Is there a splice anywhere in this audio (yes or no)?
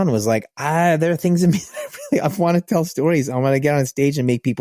no